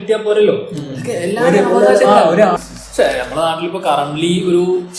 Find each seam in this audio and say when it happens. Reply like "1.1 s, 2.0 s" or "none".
2.6 s